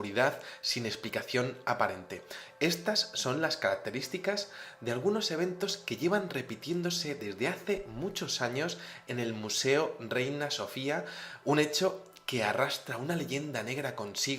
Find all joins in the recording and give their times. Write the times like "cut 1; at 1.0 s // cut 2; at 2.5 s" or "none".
cut 1; at 5.1 s